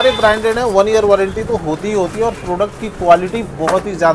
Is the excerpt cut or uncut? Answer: uncut